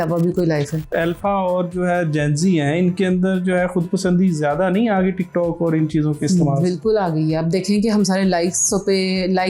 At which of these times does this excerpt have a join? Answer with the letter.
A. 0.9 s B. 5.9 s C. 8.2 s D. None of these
A